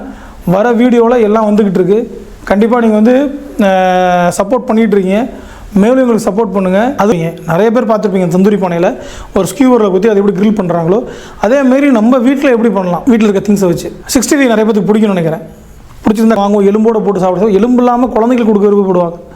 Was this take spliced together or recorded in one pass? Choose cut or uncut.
cut